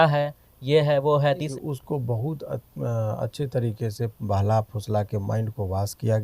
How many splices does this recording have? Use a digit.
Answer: 1